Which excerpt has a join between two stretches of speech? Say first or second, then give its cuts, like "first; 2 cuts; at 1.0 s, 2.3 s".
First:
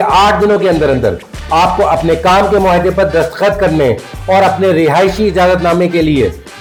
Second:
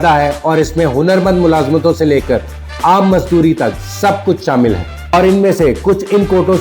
second; 1 cut; at 5.1 s